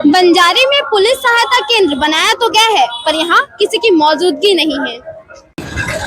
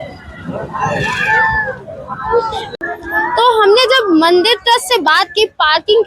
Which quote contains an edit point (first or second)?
second